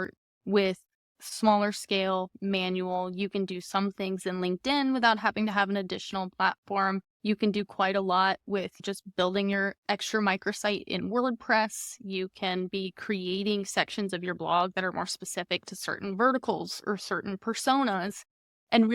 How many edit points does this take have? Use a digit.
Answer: 2